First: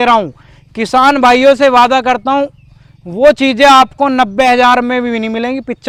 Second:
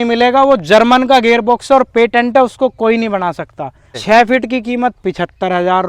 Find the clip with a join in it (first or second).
second